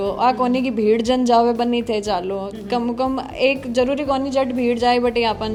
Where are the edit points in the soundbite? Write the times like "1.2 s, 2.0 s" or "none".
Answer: none

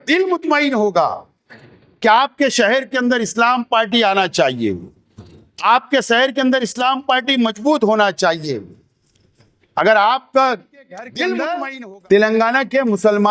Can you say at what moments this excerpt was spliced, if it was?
11.6 s

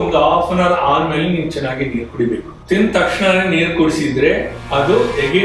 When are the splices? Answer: 2.5 s

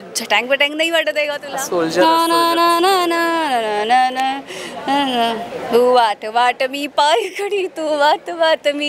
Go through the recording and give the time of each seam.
1.5 s

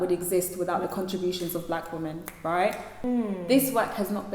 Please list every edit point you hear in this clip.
3.0 s

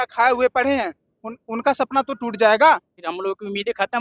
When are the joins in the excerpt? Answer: 3.0 s

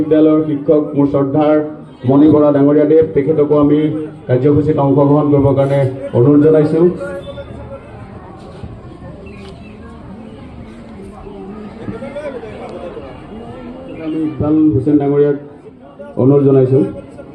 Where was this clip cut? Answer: 14.1 s

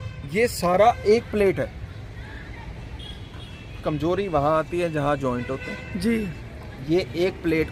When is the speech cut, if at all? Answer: none

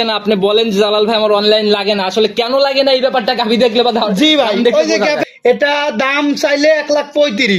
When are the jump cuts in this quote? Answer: 5.2 s

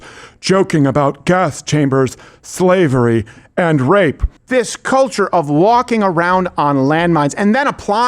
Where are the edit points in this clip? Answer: 4.3 s

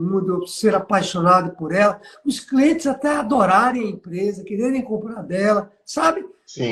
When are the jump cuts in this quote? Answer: none

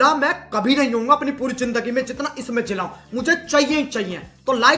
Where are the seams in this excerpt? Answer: none

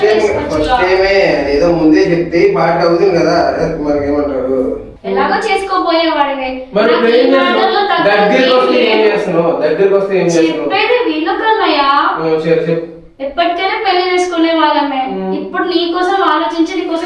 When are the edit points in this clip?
4.9 s

